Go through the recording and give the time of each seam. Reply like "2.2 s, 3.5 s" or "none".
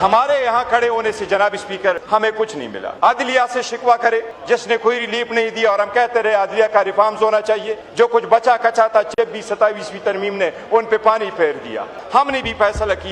2.3 s, 4.3 s, 7.8 s, 12.0 s